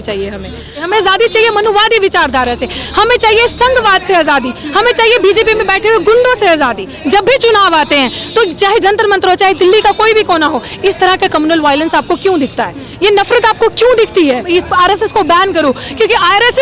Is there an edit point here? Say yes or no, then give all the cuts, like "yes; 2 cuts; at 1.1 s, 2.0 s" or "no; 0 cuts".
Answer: yes; 3 cuts; at 0.8 s, 7.0 s, 14.4 s